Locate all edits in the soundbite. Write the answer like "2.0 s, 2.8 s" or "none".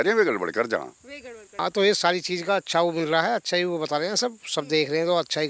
1.4 s